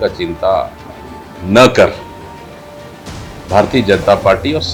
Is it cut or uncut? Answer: uncut